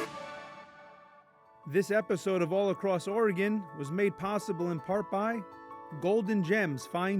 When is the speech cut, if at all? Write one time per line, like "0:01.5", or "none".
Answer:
0:01.3